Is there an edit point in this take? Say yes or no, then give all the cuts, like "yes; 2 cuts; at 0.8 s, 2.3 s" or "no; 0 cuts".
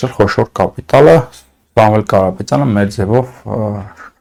no; 0 cuts